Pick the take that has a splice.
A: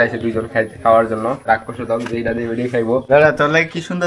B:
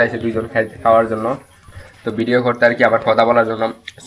A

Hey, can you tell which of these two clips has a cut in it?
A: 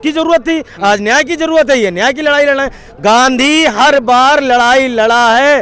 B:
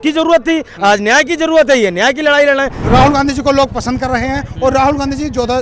B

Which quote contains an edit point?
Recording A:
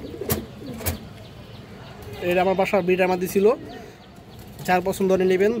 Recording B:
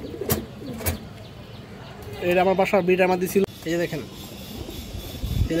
B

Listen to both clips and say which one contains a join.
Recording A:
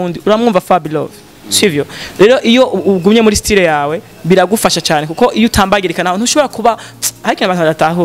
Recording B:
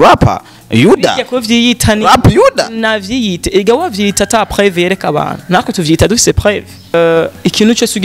B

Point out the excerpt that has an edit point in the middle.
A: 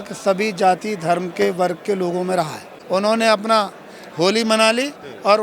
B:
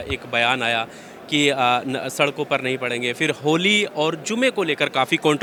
A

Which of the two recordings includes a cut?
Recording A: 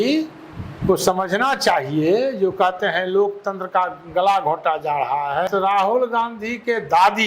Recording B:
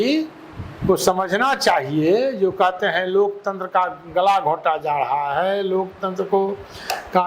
A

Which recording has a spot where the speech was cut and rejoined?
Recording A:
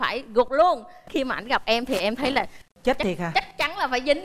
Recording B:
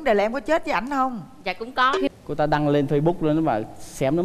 B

